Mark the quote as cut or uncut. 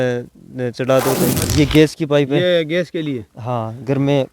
cut